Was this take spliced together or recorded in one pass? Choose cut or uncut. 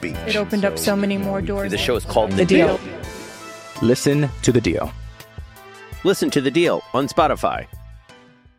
uncut